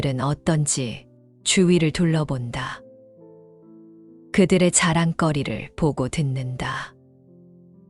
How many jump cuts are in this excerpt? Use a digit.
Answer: 2